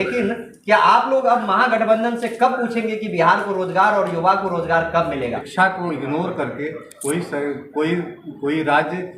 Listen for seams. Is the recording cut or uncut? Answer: cut